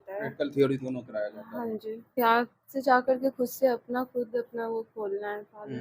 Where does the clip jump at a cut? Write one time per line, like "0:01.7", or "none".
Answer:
0:02.2

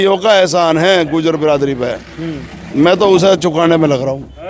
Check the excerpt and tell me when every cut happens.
none

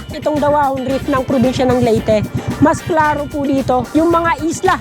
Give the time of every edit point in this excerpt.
none

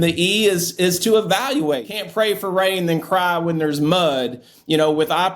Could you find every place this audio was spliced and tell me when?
0:02.0

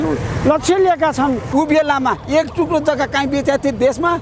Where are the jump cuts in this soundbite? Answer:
0:01.4

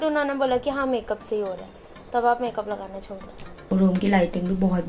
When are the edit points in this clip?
0:03.7

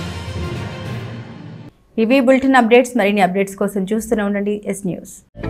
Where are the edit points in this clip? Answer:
none

